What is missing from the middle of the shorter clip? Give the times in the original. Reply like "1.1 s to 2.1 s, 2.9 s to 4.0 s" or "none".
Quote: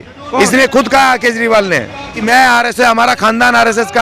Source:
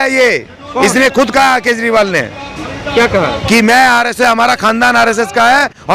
2.7 s to 3.6 s